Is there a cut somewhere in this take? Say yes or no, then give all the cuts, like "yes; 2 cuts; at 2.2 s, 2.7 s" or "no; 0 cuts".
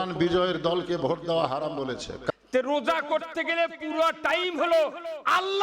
yes; 1 cut; at 2.3 s